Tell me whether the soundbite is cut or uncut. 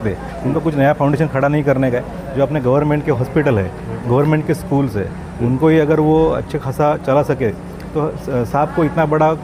uncut